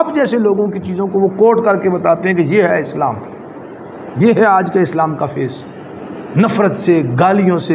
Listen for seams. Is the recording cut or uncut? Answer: uncut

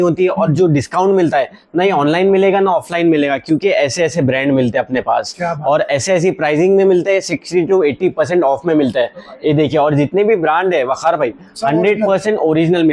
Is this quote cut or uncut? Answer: uncut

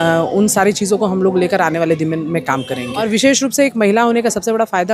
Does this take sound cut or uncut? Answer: cut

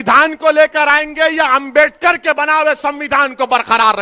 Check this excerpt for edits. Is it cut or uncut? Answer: uncut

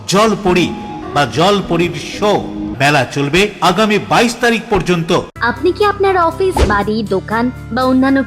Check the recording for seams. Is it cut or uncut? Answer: cut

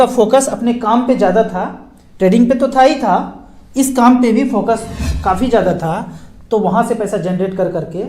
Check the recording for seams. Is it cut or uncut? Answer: uncut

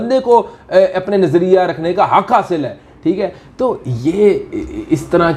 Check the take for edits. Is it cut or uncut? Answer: uncut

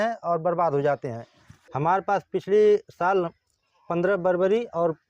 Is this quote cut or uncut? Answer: cut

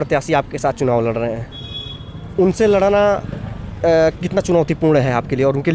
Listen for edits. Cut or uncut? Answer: cut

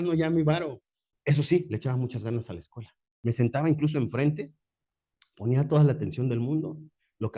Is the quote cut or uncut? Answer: cut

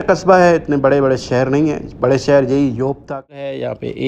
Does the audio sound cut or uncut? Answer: cut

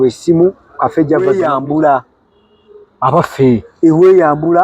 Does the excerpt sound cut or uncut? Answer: cut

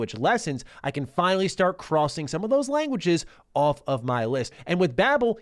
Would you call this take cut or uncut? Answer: cut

